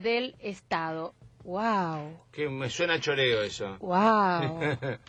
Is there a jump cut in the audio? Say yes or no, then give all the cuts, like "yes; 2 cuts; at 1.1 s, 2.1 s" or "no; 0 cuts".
no; 0 cuts